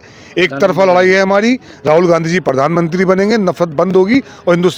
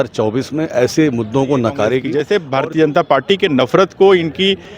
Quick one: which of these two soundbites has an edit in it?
second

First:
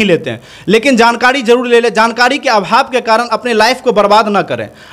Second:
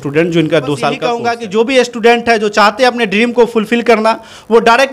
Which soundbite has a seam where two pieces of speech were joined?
second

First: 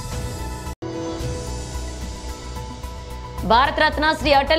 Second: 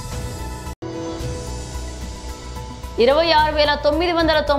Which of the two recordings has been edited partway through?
first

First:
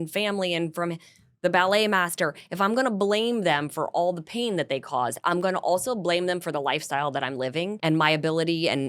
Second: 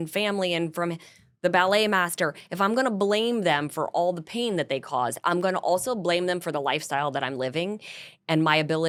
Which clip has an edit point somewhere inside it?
first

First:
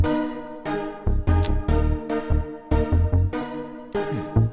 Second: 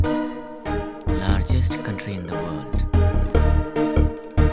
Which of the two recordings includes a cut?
second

